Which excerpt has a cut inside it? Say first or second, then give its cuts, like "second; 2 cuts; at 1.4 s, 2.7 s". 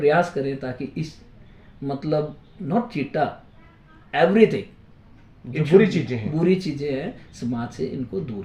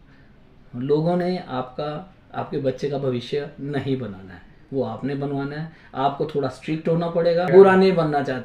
second; 1 cut; at 7.5 s